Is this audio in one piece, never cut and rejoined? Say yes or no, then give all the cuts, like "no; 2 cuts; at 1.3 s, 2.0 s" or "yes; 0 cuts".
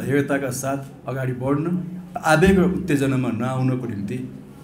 no; 1 cut; at 2.0 s